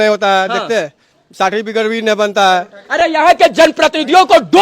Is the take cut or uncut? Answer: uncut